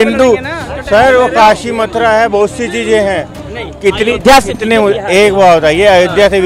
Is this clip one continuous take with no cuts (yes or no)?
yes